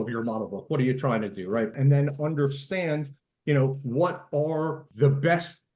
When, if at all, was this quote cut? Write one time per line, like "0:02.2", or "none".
0:01.7
0:04.8